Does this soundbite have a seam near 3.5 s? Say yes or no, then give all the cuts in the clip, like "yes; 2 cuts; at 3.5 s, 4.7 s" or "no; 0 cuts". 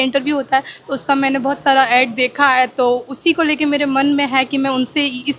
no; 0 cuts